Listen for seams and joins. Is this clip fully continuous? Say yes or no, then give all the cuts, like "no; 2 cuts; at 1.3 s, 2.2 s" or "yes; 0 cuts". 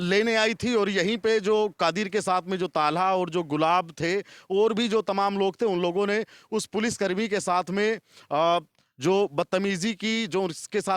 yes; 0 cuts